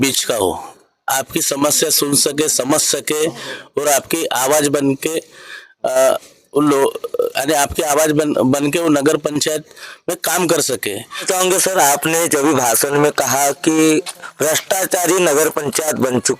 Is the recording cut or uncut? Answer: cut